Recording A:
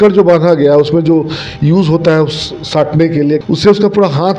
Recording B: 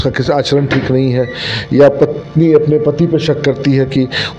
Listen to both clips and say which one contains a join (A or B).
A